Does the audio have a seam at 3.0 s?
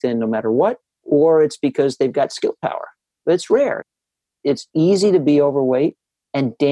yes; 2 cuts; at 3.0 s, 4.0 s

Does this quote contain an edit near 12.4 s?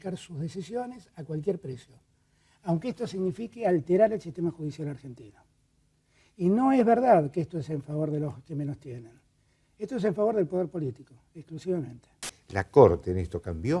yes; 1 cut; at 12.4 s

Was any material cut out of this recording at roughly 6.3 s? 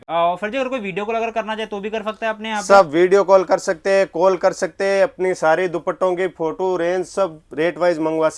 no; 0 cuts

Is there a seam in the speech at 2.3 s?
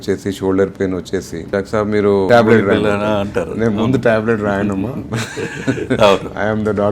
yes; 1 cut; at 2.3 s

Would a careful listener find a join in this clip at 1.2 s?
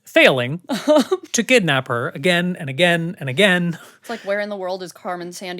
no; 1 cut; at 4.1 s

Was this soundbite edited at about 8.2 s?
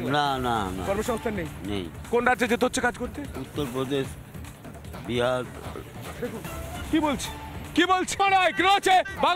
yes; 1 cut; at 8.2 s

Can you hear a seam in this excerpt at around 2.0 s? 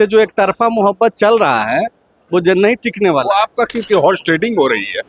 no; 1 cut; at 3.8 s

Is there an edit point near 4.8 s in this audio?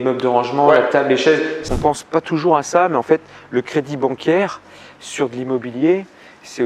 no; 1 cut; at 1.6 s

